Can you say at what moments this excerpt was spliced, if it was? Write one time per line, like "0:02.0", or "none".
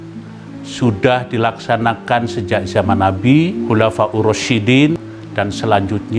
0:03.6
0:05.1

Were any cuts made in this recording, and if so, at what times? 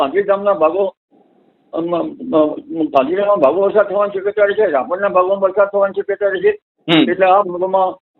none

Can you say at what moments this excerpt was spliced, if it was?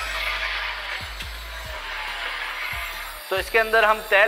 none

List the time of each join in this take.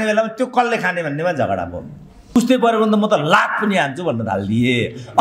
0:02.4

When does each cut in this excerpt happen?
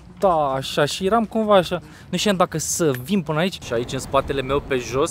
0:03.6

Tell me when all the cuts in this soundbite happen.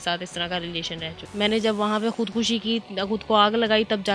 0:01.2

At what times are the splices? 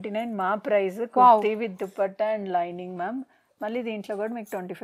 none

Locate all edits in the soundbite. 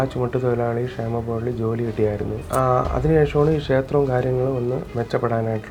none

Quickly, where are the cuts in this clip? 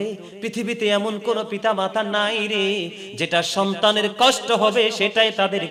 none

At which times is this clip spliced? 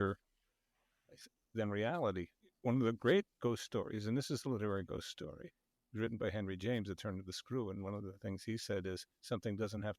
0:02.4

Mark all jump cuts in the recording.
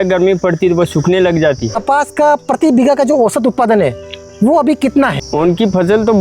0:01.8
0:05.2

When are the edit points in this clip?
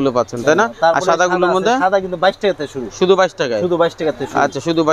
none

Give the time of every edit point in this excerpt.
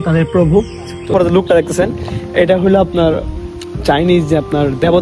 0:01.1

